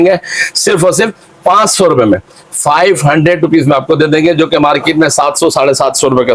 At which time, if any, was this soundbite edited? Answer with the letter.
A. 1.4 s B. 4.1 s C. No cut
C